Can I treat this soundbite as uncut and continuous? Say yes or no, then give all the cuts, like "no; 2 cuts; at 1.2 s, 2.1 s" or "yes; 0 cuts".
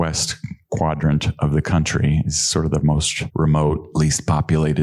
no; 2 cuts; at 3.2 s, 3.9 s